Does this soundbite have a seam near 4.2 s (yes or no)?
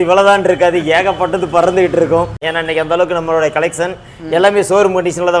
no